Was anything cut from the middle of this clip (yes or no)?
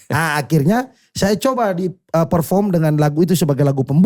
no